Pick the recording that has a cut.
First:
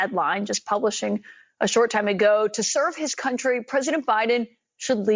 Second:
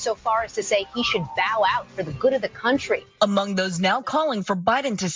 second; 1 cut; at 3.1 s

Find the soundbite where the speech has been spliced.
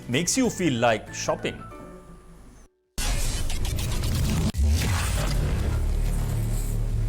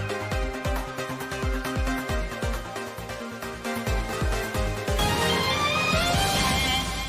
first; 1 cut; at 6.2 s

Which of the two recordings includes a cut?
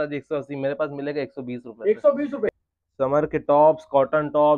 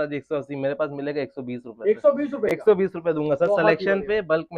first; 1 cut; at 2.6 s

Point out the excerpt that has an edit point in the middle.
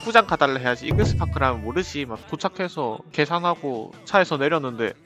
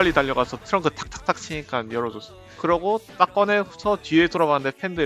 first; 1 cut; at 2.2 s

